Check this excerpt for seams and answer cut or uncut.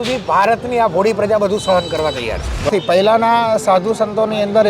cut